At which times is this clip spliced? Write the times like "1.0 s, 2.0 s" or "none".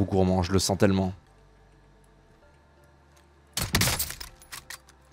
1.3 s

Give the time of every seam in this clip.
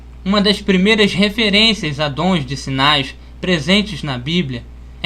3.3 s

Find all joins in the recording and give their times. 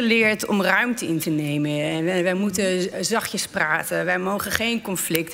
none

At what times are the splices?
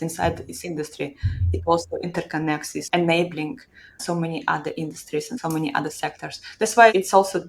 2.8 s, 4.0 s, 5.3 s

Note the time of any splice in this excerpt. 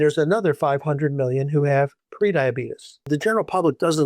3.1 s

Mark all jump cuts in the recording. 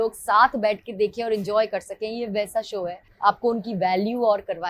3.0 s

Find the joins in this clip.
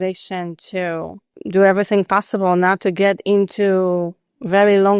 1.3 s

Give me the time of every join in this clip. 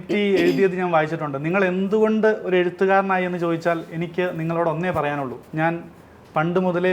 5.4 s

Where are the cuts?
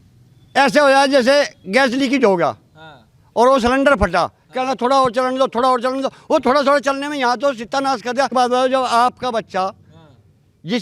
8.3 s

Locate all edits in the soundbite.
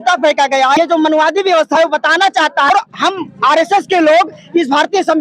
0.8 s, 2.7 s

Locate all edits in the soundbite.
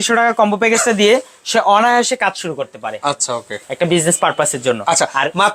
none

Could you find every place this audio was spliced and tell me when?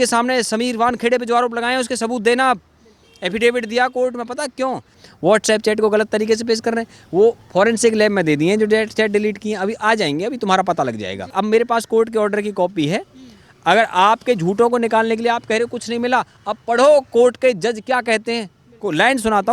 5.0 s, 11.3 s

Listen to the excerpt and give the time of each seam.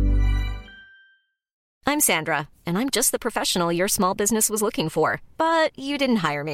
1.7 s

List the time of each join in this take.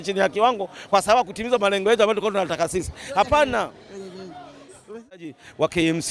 5.2 s

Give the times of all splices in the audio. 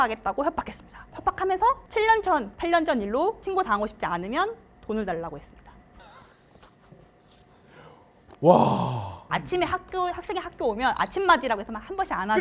9.2 s

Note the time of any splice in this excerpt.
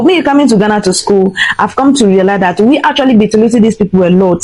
none

